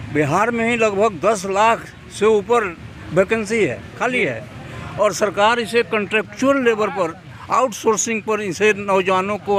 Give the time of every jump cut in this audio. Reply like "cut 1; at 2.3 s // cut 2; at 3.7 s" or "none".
none